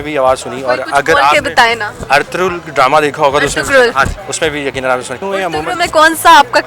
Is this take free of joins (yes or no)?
no